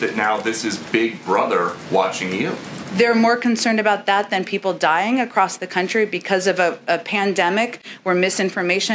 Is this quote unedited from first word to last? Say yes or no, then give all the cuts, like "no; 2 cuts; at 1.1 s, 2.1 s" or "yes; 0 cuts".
yes; 0 cuts